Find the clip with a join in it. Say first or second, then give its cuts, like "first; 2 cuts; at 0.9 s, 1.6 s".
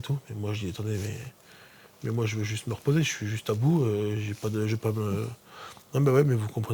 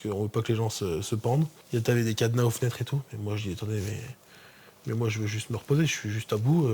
second; 1 cut; at 1.6 s